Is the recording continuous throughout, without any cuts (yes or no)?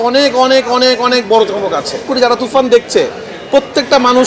no